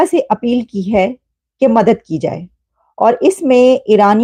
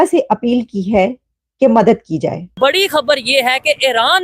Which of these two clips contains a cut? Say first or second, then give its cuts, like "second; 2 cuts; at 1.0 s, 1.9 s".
second; 1 cut; at 2.5 s